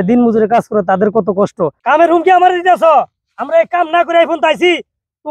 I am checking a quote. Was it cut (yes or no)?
yes